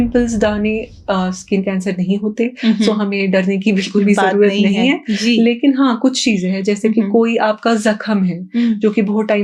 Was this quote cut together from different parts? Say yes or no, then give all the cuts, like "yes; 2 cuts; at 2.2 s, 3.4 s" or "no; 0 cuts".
no; 0 cuts